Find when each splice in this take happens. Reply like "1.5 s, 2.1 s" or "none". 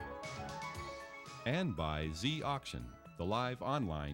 1.3 s

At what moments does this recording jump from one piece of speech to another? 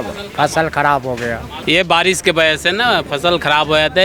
1.5 s

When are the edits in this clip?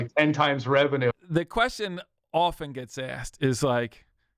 1.1 s

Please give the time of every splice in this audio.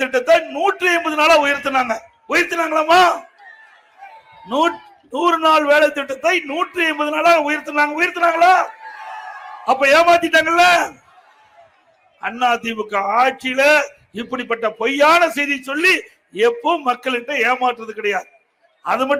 none

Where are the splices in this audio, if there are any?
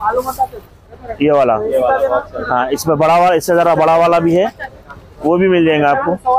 none

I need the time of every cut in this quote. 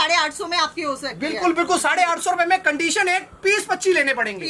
none

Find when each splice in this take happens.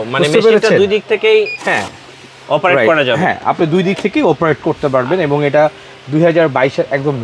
none

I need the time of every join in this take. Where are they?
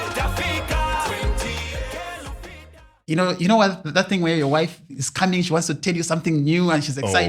2.9 s

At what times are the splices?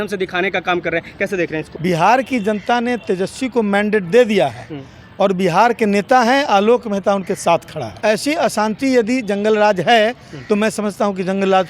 1.7 s, 7.9 s

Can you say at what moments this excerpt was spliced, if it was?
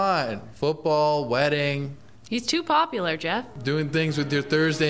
3.5 s

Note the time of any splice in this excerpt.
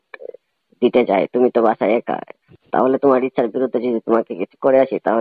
none

